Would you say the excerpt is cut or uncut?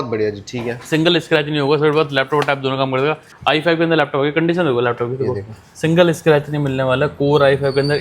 cut